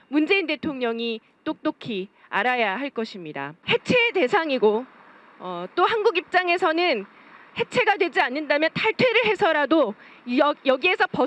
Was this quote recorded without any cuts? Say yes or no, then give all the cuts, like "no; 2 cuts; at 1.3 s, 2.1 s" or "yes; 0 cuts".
no; 1 cut; at 3.6 s